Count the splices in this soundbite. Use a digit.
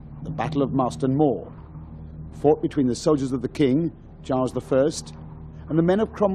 1